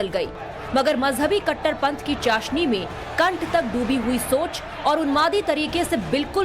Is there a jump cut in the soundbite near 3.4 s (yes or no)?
yes